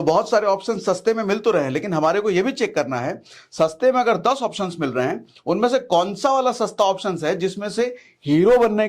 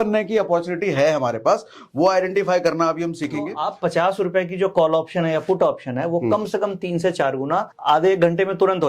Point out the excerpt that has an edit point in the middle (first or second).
second